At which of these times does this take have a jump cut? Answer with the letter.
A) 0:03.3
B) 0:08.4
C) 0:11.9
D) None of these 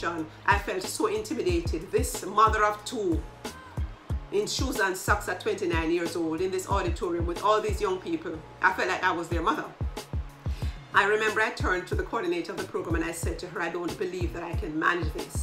D